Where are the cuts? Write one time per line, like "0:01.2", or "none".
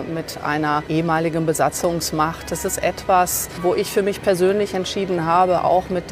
0:00.8
0:03.4